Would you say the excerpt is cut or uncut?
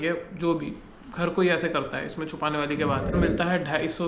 cut